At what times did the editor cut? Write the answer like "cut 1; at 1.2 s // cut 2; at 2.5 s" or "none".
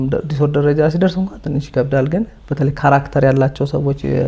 none

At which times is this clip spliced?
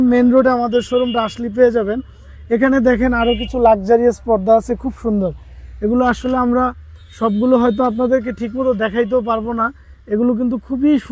none

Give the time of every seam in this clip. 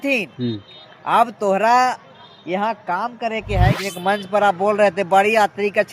cut 1; at 3.8 s

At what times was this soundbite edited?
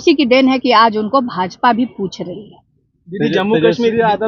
none

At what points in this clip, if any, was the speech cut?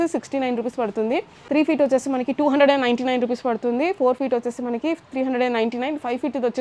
cut 1; at 1.3 s

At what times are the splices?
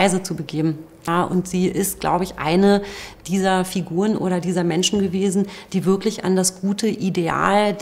cut 1; at 1.1 s

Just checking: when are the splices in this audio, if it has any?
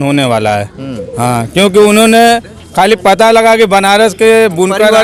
none

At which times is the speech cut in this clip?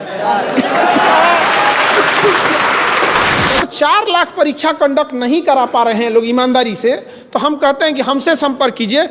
cut 1; at 3.6 s

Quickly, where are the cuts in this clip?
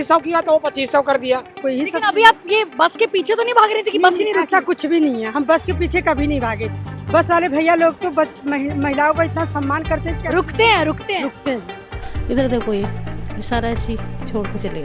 cut 1; at 1.5 s // cut 2; at 12.0 s

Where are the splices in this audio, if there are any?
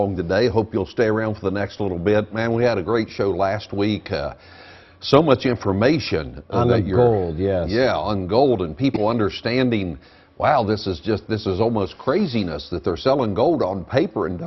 none

